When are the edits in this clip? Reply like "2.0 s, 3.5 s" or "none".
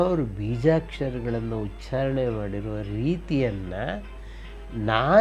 none